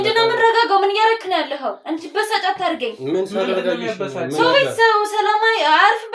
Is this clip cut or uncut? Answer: uncut